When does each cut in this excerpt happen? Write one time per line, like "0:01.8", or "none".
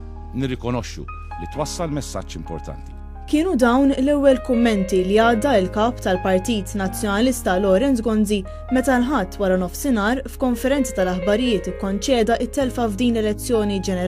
none